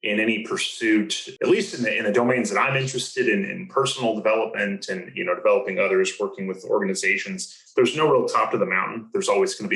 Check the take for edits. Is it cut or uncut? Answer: cut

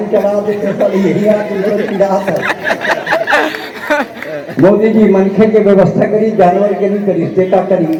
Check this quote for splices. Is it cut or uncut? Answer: uncut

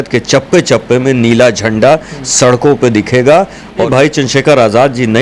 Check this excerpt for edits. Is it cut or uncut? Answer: cut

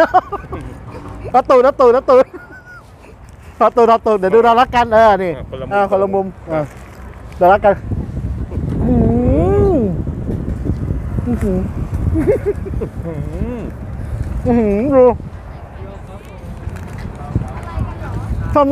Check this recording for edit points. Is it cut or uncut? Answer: uncut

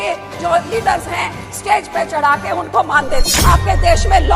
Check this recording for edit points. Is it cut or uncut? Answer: cut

